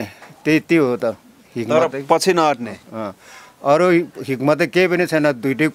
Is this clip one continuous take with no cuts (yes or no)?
yes